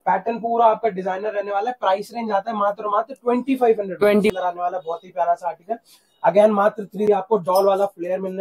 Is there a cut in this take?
yes; 2 cuts; at 4.3 s, 7.0 s

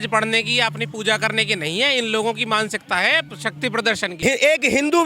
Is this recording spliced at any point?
yes; 1 cut; at 4.1 s

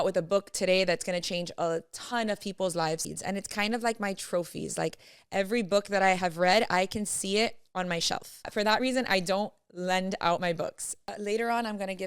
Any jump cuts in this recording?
yes; 3 cuts; at 3.1 s, 8.5 s, 11.1 s

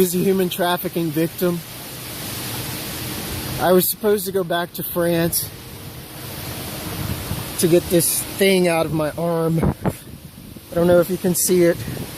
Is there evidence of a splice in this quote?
yes; 1 cut; at 6.3 s

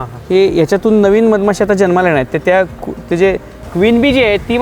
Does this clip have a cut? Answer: yes; 1 cut; at 3.6 s

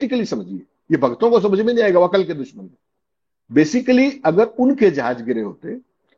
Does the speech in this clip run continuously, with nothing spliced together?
yes; 0 cuts

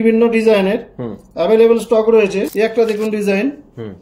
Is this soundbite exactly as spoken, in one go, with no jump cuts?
no; 1 cut; at 2.5 s

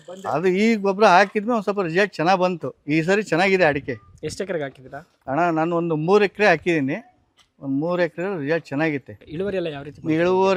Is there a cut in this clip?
no; 0 cuts

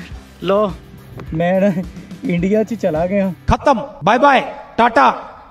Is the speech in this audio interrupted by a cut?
no; 0 cuts

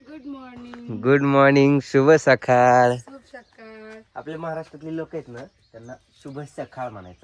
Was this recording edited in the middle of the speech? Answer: no; 0 cuts

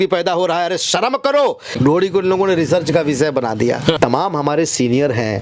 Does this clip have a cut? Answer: yes; 2 cuts; at 1.8 s, 4.0 s

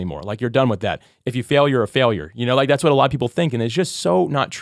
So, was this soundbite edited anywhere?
no; 0 cuts

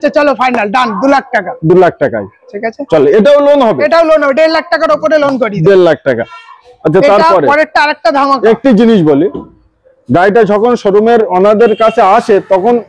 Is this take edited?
no; 0 cuts

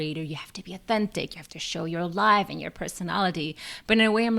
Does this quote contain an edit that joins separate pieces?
no; 0 cuts

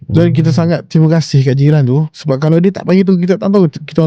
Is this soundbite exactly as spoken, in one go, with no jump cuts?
no; 1 cut; at 2.1 s

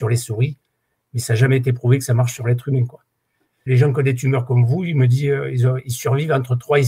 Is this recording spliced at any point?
yes; 1 cut; at 3.6 s

